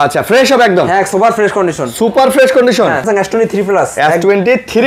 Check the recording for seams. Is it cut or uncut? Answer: cut